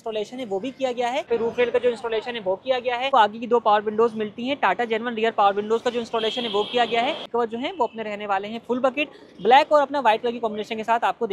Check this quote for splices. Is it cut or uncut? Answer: cut